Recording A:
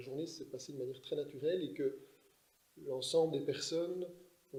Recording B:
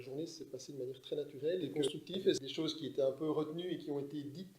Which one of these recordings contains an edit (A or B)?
B